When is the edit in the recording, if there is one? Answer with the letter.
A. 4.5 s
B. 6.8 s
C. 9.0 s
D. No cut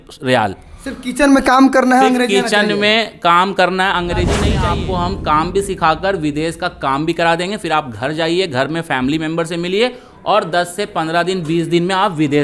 A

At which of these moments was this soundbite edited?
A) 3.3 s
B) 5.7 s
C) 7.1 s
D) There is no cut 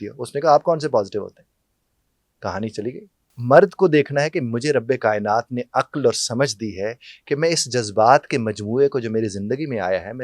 A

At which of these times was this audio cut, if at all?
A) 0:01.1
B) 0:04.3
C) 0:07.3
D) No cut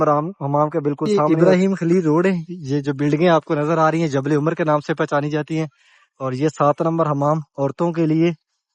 A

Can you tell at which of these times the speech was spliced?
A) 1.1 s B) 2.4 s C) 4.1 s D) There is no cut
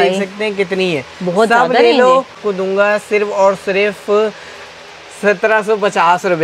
B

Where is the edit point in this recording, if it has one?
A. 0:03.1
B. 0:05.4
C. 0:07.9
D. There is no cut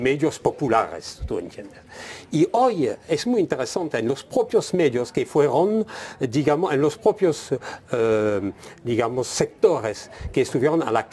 B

